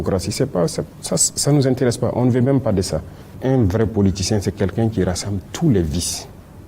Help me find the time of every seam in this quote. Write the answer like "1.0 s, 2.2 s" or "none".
3.3 s